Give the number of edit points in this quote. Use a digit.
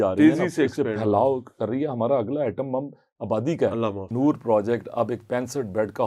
1